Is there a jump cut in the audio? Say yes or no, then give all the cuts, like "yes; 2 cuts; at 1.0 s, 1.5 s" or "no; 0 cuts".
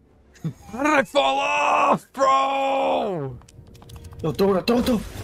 no; 0 cuts